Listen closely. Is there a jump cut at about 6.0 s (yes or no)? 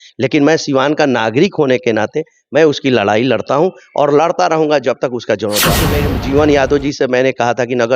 yes